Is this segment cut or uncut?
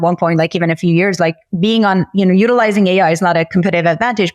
uncut